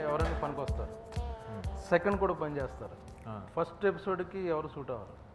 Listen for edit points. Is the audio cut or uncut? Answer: uncut